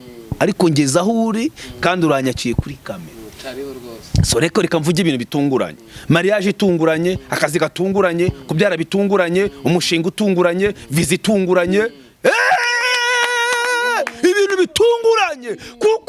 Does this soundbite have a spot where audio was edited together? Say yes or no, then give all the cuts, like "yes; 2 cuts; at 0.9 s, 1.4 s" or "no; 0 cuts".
no; 0 cuts